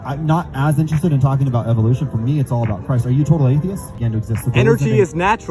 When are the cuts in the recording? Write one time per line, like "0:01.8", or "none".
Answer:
0:04.0

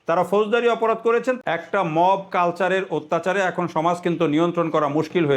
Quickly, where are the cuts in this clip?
0:01.4

